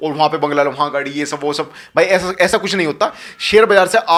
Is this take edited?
no; 0 cuts

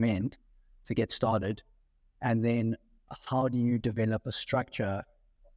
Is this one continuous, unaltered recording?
yes; 0 cuts

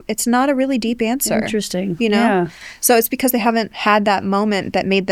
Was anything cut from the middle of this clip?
no; 0 cuts

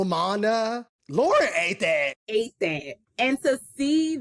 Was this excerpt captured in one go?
no; 3 cuts; at 0.9 s, 2.2 s, 3.0 s

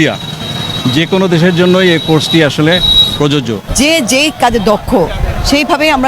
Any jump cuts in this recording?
yes; 1 cut; at 3.6 s

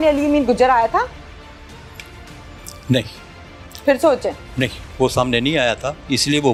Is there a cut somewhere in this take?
no; 0 cuts

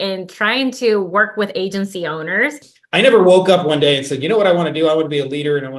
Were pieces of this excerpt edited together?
yes; 1 cut; at 2.7 s

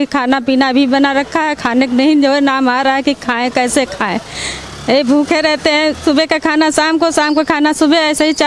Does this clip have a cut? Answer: no; 0 cuts

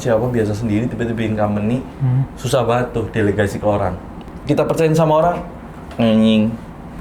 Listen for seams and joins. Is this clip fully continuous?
no; 1 cut; at 4.3 s

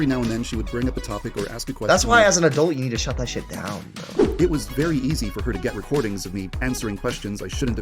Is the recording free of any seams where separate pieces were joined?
no; 1 cut; at 4.0 s

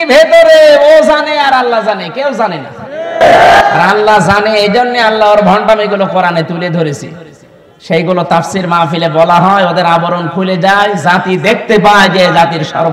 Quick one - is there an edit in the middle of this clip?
no; 0 cuts

